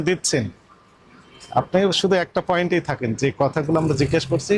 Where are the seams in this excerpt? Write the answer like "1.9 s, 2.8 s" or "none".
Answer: none